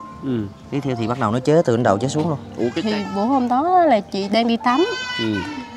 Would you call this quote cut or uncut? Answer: cut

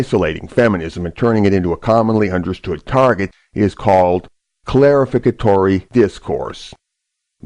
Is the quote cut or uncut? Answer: uncut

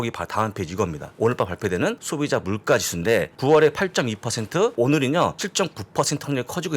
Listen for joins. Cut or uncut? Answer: cut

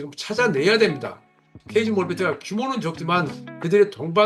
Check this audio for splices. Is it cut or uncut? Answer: cut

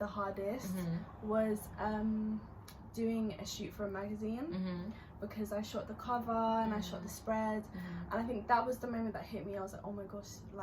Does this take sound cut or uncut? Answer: uncut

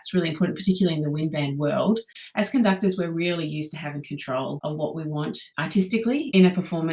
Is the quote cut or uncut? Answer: cut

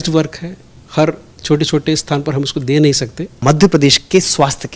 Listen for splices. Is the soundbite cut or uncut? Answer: cut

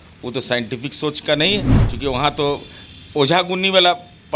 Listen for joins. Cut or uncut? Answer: cut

